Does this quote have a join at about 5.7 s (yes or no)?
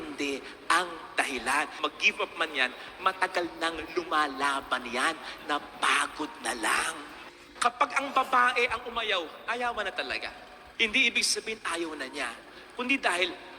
no